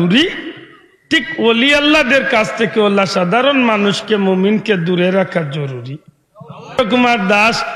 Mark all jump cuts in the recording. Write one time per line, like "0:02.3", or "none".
0:06.7